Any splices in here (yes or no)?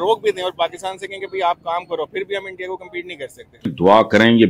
yes